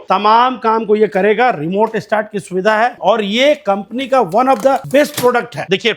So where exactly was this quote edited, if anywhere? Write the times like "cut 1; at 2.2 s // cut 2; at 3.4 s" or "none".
cut 1; at 3.0 s // cut 2; at 4.8 s